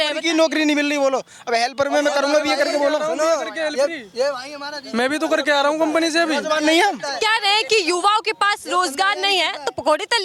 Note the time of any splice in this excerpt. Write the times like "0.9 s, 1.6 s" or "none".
none